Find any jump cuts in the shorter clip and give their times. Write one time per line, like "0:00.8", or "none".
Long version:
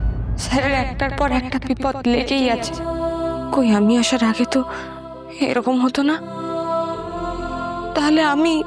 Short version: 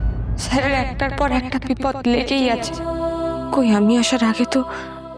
none